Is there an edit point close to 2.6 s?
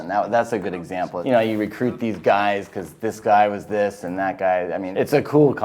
no; 2 cuts; at 1.2 s, 4.9 s

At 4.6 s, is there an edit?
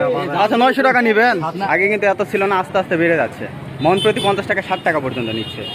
no; 1 cut; at 1.6 s

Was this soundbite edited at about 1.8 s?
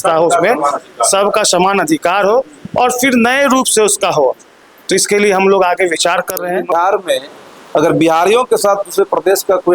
no; 1 cut; at 6.7 s

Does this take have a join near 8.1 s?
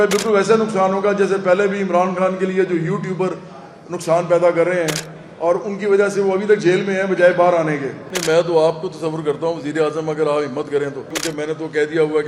yes; 2 cuts; at 8.1 s, 11.2 s

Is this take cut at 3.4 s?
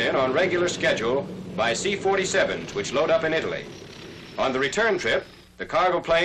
yes; 1 cut; at 3.4 s

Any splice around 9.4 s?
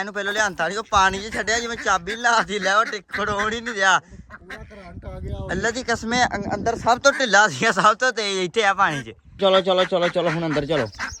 yes; 1 cut; at 9.4 s

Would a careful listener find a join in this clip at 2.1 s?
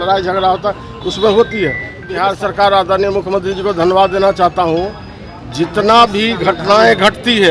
yes; 1 cut; at 2.1 s

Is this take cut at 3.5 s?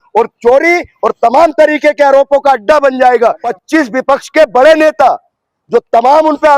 yes; 1 cut; at 3.5 s

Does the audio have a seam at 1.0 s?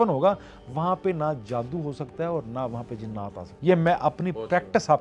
no; 1 cut; at 3.5 s

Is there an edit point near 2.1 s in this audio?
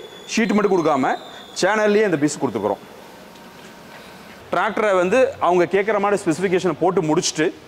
no; 1 cut; at 4.3 s

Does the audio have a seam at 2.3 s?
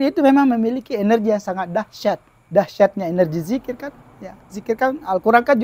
yes; 1 cut; at 2.3 s

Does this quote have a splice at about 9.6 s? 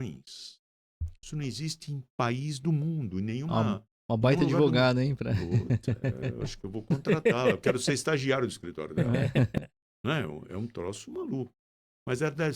yes; 1 cut; at 9.6 s

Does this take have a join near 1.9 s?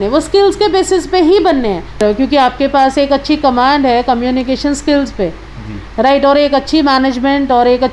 no; 0 cuts

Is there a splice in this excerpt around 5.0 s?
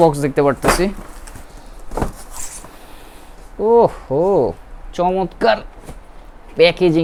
no; 0 cuts

